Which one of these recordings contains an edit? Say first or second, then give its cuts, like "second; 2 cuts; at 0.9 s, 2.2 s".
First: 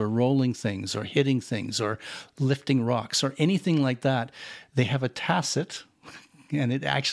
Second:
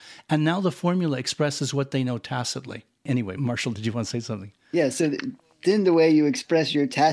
second; 1 cut; at 3.0 s